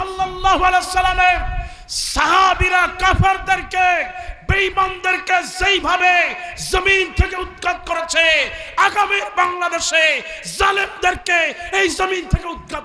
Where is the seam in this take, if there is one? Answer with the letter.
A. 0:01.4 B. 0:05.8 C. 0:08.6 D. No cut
D